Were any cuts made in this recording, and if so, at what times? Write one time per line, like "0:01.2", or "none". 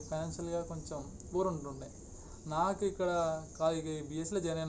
none